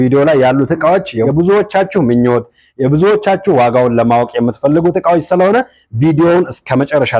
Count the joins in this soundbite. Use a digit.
1